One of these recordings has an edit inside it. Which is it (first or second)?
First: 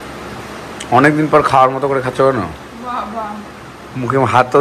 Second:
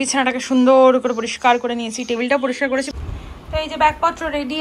second